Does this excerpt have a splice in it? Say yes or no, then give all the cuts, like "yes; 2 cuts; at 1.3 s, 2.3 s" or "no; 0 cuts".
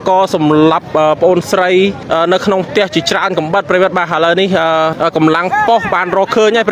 yes; 2 cuts; at 2.0 s, 5.0 s